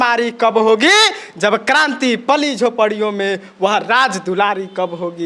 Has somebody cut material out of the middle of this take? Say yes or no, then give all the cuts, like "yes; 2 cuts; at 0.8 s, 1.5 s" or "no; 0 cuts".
no; 0 cuts